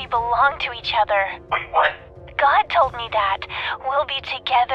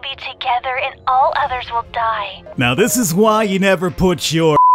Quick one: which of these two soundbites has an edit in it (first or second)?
second